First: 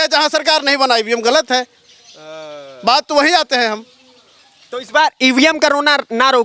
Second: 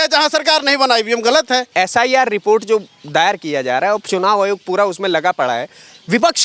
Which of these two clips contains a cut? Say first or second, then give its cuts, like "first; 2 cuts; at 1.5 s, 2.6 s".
second; 1 cut; at 1.7 s